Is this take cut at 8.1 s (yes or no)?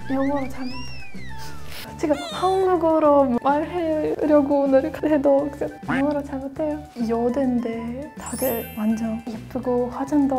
no